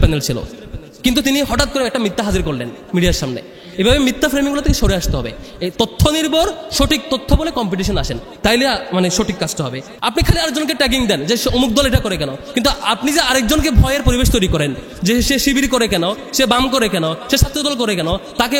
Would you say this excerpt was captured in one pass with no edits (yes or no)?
no